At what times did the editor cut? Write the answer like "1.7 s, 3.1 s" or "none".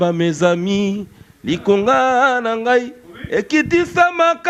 none